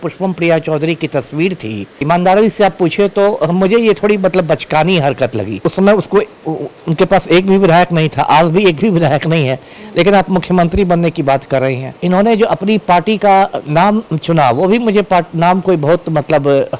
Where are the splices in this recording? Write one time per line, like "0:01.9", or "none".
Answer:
0:01.9
0:05.5
0:12.0